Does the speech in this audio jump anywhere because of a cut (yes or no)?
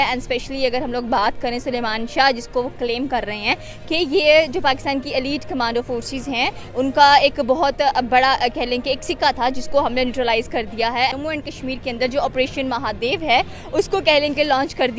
yes